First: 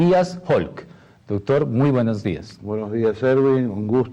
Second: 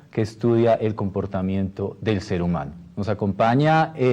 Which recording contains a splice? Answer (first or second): second